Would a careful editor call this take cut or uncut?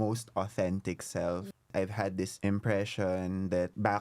cut